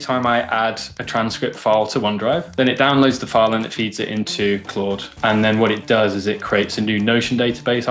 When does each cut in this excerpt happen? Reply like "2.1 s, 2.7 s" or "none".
2.5 s, 5.1 s